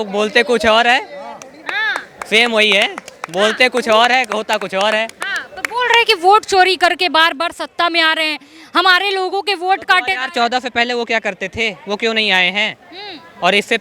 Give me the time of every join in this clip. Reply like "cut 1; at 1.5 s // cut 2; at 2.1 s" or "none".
none

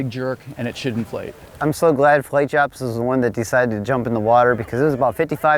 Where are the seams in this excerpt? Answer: cut 1; at 1.4 s

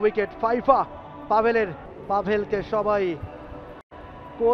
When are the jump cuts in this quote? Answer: cut 1; at 1.9 s

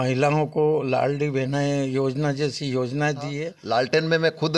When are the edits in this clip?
cut 1; at 3.5 s

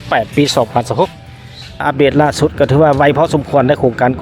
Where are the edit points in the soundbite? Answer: cut 1; at 1.8 s

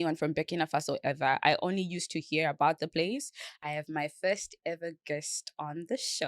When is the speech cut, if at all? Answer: cut 1; at 3.6 s

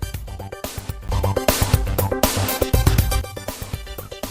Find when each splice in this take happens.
none

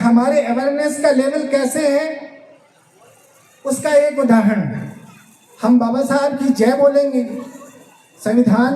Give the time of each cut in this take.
none

